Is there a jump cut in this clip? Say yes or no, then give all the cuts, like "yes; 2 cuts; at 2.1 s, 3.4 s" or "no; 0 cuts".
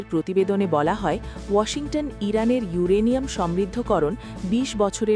no; 0 cuts